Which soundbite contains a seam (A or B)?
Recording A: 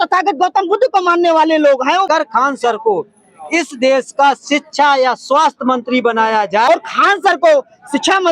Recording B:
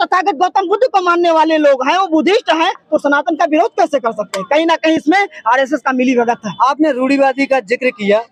A